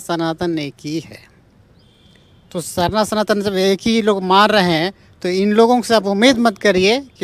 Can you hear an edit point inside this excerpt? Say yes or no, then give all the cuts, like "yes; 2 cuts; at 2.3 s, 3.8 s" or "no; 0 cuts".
no; 0 cuts